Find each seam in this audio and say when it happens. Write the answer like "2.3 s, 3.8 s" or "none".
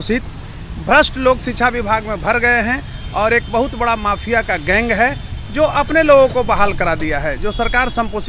none